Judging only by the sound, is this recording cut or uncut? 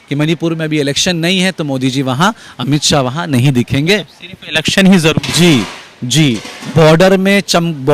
uncut